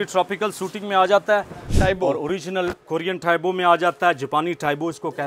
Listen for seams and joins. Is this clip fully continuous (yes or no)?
no